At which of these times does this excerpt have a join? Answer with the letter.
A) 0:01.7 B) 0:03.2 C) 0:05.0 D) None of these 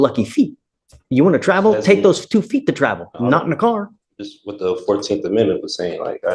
D